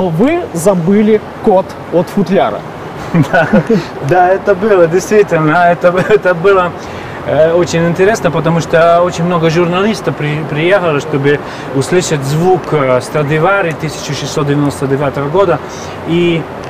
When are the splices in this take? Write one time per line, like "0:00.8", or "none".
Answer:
none